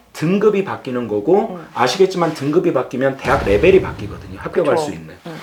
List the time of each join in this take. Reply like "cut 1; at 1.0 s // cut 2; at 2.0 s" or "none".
none